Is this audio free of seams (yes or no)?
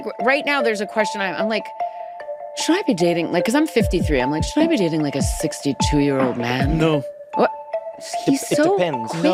yes